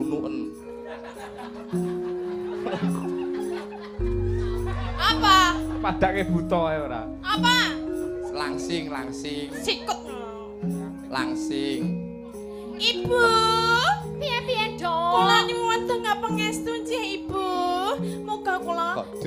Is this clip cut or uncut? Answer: uncut